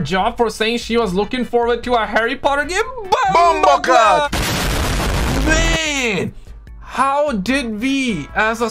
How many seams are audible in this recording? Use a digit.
1